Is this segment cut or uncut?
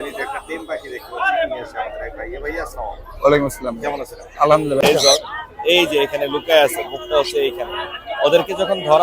cut